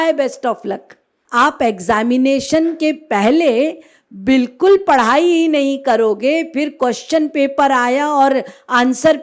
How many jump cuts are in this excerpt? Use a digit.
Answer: 1